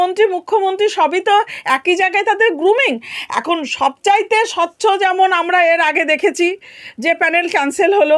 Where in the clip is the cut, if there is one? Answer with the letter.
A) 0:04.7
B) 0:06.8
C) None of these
C